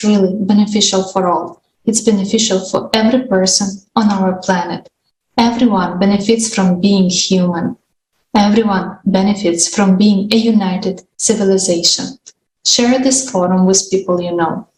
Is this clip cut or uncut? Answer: uncut